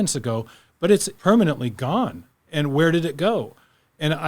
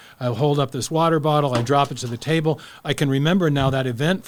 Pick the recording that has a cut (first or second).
first